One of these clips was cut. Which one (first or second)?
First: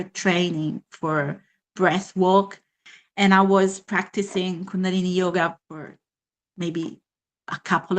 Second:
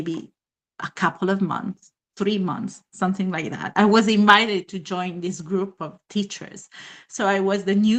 first